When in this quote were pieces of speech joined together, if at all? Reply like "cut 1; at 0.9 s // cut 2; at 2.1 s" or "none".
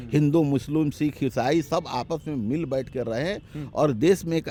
none